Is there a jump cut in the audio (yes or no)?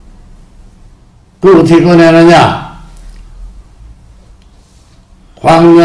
yes